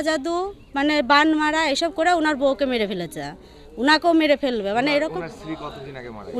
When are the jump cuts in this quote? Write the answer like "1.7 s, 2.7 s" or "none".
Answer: none